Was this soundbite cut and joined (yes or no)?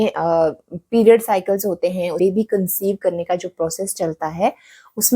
yes